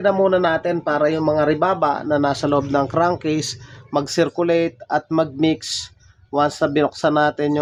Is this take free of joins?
yes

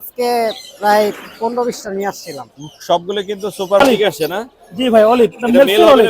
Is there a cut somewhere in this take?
yes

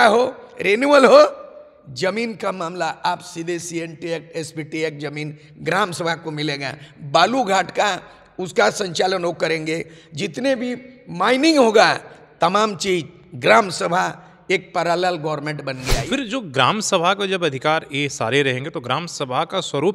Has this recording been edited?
yes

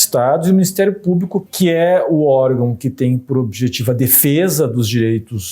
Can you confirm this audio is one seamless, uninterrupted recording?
no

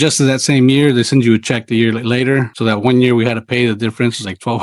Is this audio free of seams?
no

